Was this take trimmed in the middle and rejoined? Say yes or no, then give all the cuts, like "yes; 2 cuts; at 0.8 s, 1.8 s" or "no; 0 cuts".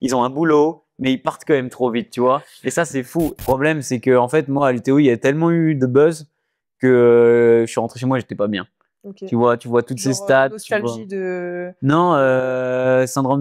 yes; 1 cut; at 3.3 s